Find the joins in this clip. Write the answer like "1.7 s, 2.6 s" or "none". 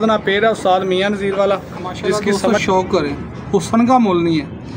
2.3 s